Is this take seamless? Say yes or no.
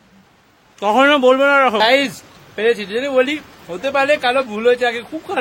no